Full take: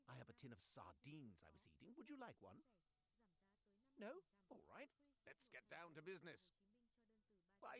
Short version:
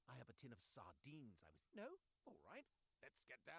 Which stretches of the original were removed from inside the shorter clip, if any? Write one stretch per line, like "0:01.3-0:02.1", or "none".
0:01.5-0:03.8

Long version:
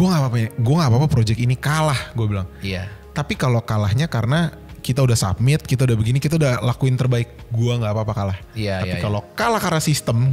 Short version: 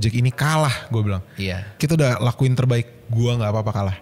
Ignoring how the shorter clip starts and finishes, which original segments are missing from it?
0:03.0-0:06.2

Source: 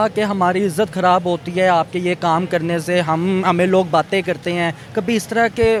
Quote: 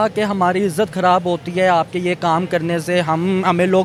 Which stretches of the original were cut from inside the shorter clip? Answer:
none

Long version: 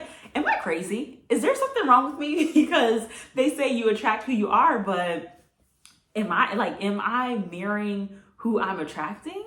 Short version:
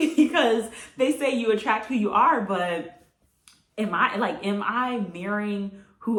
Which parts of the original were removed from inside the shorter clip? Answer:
none

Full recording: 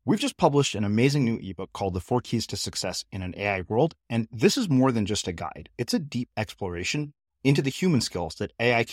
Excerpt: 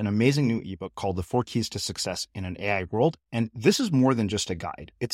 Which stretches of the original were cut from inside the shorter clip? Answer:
none

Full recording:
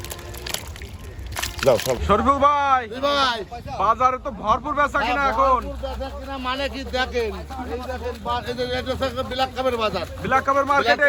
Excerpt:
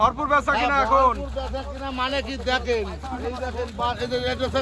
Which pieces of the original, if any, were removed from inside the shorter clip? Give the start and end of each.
none

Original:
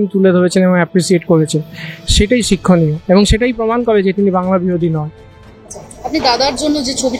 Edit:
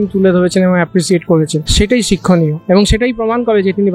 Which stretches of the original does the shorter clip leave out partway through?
0:01.6-0:02.0

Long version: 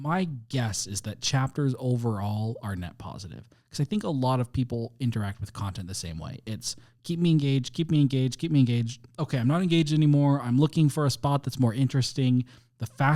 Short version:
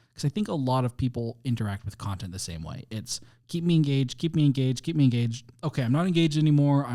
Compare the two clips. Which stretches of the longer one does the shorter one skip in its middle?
none

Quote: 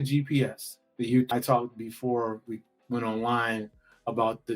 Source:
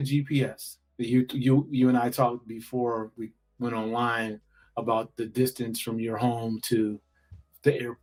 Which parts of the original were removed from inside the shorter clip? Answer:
0:01.3-0:02.0

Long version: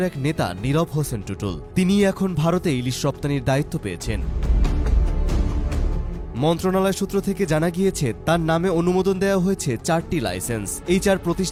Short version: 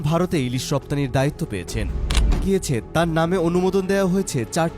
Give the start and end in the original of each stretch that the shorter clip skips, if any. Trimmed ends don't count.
0:04.7-0:07.7

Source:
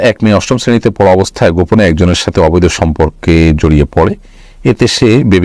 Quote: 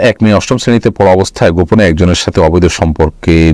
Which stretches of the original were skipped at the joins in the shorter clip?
none

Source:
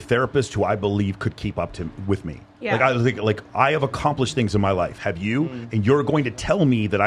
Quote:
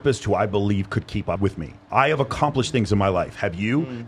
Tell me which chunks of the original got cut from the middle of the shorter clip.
0:02.0-0:03.4

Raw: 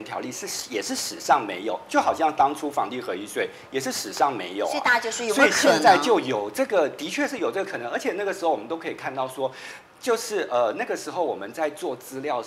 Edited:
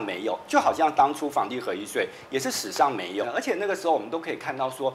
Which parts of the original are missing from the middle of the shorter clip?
0:04.6-0:07.8

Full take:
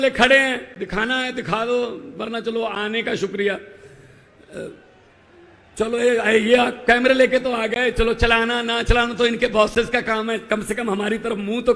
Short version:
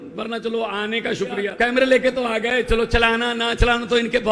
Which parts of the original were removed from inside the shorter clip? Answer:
0:03.5-0:06.8

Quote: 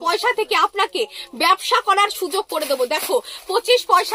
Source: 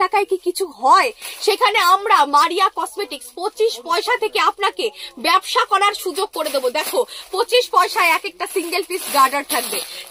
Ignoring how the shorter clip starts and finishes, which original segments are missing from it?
none

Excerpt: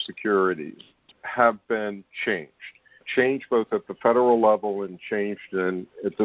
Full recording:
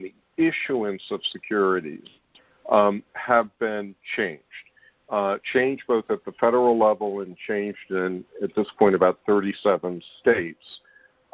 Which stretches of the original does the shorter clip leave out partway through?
0:02.5-0:03.1
0:05.0-0:05.4

